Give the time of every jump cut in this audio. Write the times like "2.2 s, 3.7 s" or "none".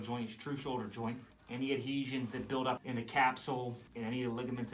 1.3 s, 2.8 s, 3.8 s